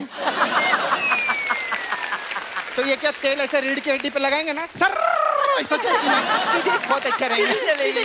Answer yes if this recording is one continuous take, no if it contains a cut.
yes